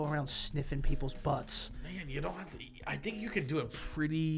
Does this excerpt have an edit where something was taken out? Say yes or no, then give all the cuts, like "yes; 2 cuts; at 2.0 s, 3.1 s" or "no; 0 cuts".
no; 0 cuts